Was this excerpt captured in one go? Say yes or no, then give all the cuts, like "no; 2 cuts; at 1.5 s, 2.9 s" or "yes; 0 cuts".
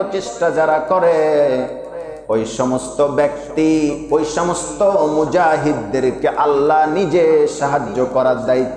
yes; 0 cuts